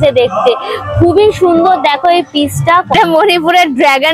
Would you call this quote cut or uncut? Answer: cut